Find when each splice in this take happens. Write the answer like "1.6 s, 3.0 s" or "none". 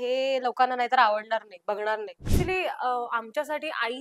2.3 s